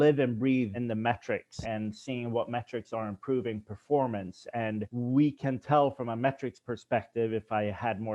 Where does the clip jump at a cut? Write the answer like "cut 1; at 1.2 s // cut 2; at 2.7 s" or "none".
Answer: cut 1; at 1.1 s // cut 2; at 4.9 s